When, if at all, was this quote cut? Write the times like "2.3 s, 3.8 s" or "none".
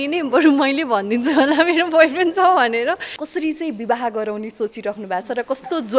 3.1 s